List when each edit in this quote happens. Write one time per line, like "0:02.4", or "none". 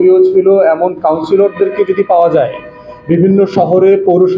none